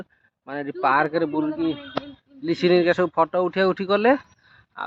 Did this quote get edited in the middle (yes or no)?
no